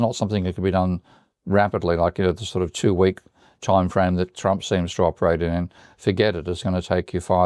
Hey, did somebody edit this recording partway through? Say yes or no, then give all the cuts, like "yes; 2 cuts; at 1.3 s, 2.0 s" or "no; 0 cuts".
no; 0 cuts